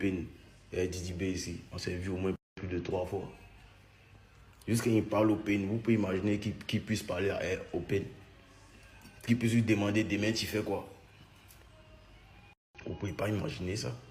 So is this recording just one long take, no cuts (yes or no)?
yes